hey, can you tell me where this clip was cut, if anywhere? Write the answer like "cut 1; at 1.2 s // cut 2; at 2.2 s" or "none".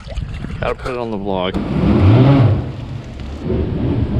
cut 1; at 1.6 s